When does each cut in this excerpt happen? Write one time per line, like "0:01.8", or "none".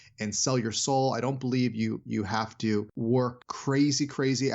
0:02.9